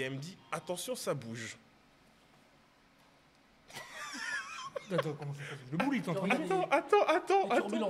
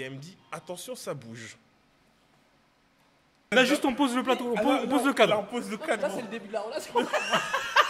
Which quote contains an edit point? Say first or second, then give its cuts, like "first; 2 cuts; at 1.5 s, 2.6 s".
second; 1 cut; at 3.4 s